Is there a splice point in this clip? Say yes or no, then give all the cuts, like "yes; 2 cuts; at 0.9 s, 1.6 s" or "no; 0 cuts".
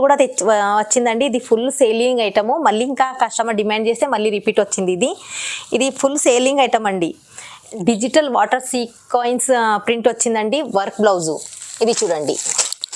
yes; 1 cut; at 7.7 s